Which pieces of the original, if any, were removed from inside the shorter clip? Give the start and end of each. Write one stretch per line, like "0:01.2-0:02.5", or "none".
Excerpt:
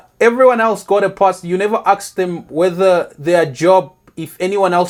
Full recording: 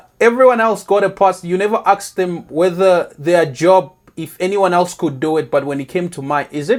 none